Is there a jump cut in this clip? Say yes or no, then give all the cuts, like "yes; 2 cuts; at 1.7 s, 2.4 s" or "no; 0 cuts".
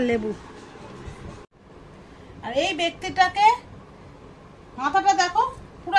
yes; 1 cut; at 1.6 s